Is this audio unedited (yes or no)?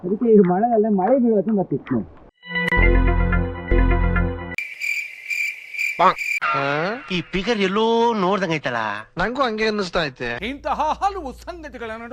no